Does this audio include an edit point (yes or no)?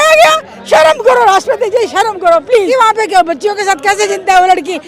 yes